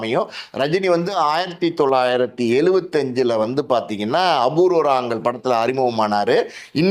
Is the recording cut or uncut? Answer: uncut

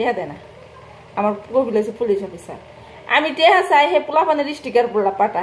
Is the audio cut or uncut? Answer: uncut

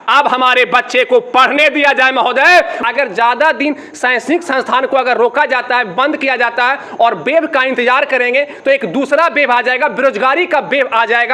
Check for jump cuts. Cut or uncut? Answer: cut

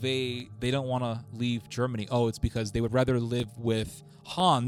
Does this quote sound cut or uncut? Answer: uncut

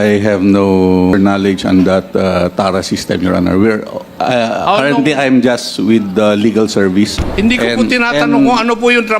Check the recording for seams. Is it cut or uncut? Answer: cut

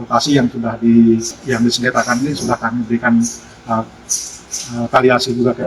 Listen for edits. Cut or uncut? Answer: cut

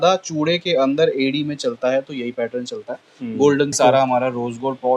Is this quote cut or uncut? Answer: cut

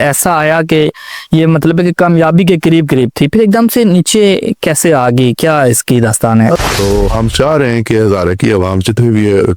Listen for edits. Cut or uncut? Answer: cut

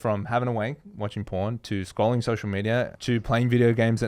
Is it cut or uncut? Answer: cut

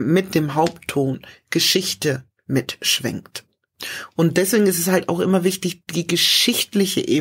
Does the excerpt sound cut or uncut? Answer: cut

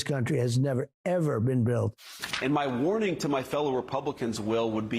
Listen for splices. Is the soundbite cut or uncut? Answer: cut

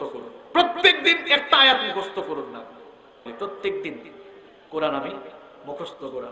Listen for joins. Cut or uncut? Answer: uncut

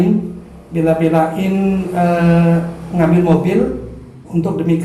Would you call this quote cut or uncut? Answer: uncut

